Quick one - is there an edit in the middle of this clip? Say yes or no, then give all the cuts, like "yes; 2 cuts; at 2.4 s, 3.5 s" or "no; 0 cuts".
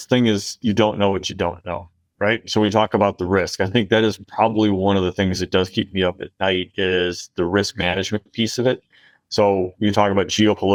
no; 0 cuts